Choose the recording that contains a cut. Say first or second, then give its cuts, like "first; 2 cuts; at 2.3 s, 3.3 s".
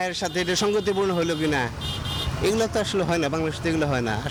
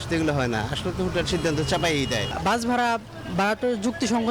second; 1 cut; at 2.2 s